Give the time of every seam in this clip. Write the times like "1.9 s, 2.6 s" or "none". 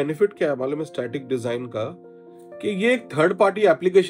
none